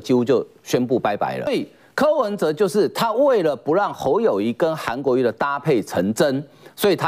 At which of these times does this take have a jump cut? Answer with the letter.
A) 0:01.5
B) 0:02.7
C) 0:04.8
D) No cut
A